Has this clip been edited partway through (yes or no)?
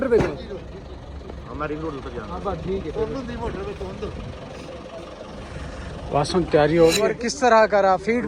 yes